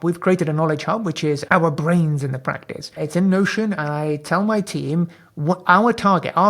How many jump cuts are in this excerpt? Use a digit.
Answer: 2